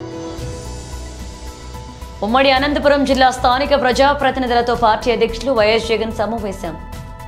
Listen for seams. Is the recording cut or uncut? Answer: uncut